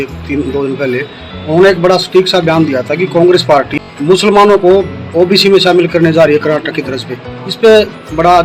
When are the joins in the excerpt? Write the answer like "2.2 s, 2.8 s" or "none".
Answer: 3.7 s